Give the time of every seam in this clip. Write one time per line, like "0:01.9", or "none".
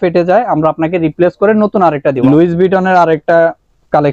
0:02.2